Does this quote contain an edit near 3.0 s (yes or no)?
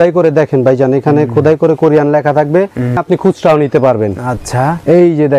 yes